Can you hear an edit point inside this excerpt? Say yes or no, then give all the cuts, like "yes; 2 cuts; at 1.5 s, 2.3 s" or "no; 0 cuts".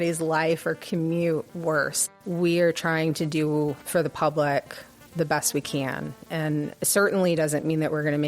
yes; 2 cuts; at 2.0 s, 3.8 s